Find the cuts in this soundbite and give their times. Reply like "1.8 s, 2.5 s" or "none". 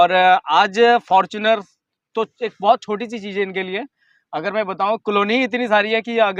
none